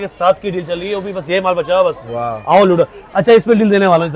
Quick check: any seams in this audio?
no; 0 cuts

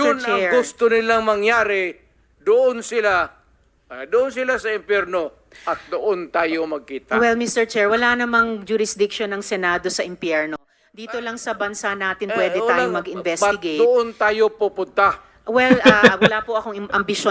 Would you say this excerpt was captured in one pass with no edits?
yes; 0 cuts

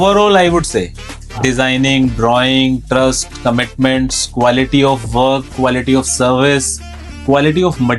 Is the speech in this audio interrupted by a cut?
no; 0 cuts

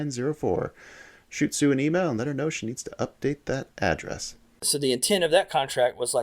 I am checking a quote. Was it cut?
yes; 1 cut; at 4.7 s

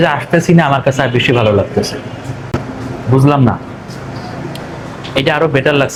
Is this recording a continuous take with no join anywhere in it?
yes; 0 cuts

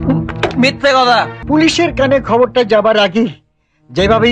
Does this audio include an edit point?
yes; 1 cut; at 1.4 s

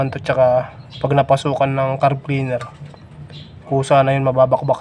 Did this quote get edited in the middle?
no; 0 cuts

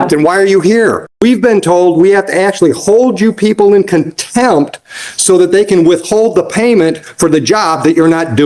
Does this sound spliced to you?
yes; 1 cut; at 1.1 s

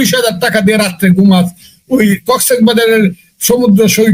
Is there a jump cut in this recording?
no; 0 cuts

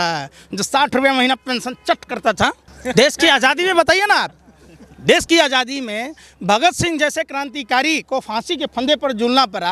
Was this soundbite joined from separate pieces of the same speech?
no; 0 cuts

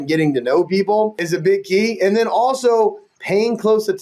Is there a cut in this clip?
yes; 1 cut; at 1.2 s

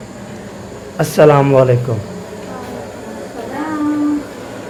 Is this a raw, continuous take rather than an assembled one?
yes; 0 cuts

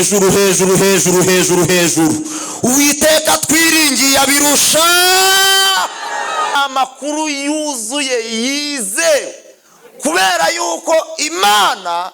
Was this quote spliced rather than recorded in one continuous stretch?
yes; 1 cut; at 6.6 s

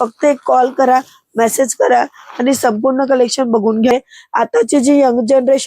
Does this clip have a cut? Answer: yes; 1 cut; at 3.9 s

